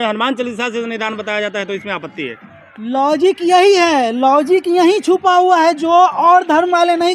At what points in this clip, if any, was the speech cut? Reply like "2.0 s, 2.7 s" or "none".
none